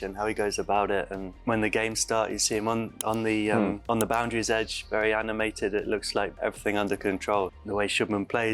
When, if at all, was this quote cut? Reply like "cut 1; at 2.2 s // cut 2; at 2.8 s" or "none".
cut 1; at 1.2 s // cut 2; at 3.8 s // cut 3; at 6.3 s // cut 4; at 7.5 s